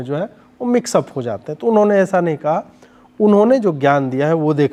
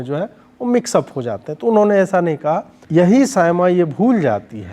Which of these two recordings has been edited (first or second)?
second